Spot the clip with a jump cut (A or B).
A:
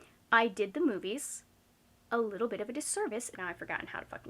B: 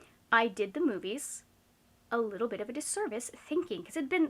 A